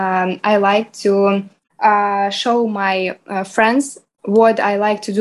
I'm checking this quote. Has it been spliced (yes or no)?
yes